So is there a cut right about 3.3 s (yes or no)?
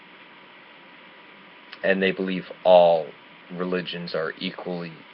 no